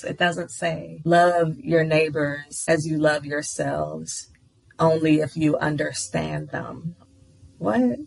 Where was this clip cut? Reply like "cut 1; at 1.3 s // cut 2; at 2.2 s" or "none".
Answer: cut 1; at 6.9 s